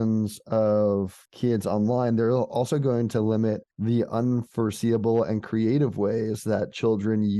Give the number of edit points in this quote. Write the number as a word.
two